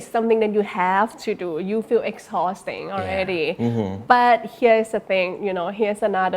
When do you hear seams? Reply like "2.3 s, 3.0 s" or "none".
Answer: none